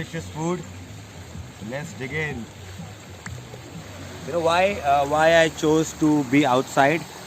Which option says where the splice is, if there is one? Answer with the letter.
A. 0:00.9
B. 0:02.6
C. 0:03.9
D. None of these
C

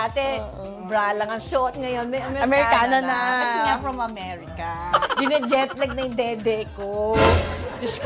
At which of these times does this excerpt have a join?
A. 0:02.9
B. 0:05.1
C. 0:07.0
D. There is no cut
B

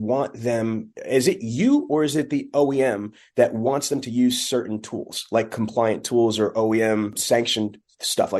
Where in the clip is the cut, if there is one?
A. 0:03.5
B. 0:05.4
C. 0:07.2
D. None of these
C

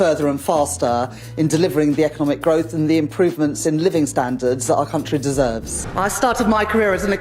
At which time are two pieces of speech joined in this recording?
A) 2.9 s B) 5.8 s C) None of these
B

